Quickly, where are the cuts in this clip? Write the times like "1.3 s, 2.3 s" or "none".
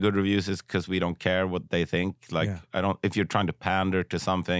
none